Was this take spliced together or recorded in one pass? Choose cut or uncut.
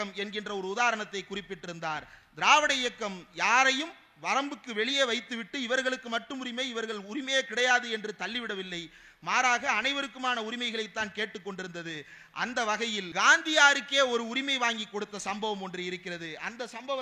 uncut